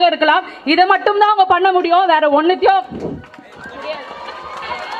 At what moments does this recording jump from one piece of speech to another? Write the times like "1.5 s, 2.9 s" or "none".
none